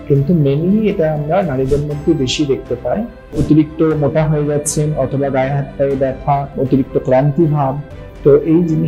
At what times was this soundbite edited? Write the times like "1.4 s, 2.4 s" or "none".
3.4 s, 6.5 s